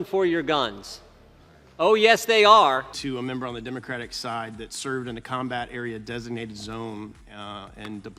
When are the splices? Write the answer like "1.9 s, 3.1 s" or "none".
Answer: none